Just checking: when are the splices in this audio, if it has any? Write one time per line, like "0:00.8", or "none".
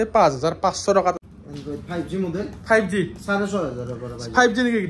0:01.2